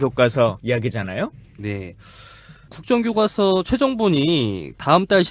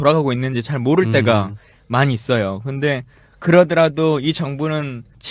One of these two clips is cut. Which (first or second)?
second